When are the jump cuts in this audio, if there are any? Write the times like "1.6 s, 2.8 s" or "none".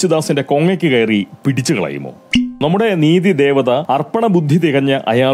2.4 s, 3.8 s